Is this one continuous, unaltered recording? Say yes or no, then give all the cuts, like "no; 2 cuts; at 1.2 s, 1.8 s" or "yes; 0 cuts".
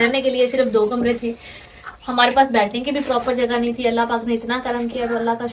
yes; 0 cuts